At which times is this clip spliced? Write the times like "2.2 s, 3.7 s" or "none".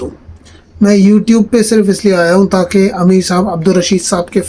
none